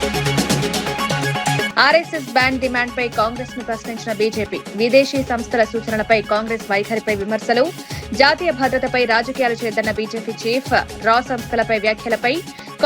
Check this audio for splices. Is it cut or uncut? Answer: cut